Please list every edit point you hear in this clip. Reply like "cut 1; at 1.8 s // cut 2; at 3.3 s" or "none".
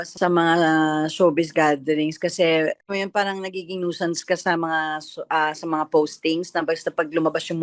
cut 1; at 2.8 s